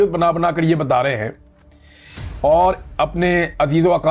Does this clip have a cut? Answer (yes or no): no